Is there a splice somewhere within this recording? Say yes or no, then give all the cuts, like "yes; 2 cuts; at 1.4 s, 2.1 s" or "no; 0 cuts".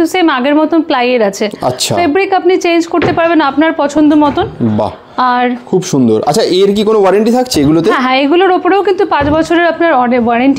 no; 0 cuts